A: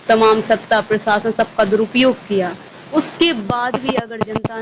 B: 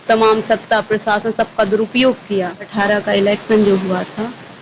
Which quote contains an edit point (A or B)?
B